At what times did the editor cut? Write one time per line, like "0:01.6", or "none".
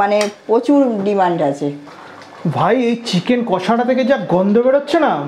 0:01.9